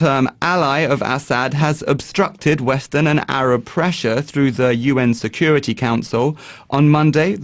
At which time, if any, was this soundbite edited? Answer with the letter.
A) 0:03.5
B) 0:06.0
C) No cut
B